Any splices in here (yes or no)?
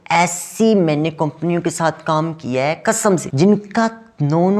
yes